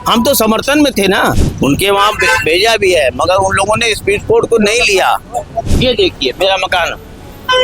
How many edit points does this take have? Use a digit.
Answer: 2